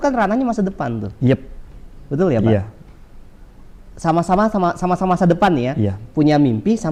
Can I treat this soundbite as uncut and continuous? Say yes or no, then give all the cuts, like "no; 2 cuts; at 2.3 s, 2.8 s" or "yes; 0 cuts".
yes; 0 cuts